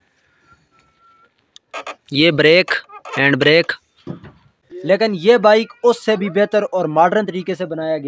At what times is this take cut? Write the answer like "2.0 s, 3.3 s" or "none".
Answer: 4.6 s